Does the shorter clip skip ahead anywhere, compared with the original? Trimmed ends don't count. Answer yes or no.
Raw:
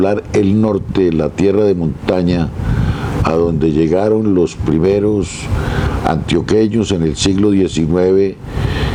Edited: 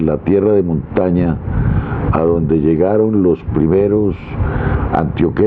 no